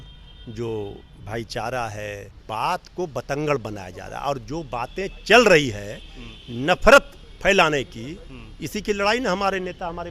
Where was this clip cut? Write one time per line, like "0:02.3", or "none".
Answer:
0:02.3